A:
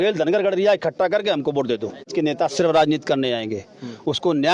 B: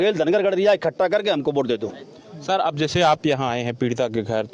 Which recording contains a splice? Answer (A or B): A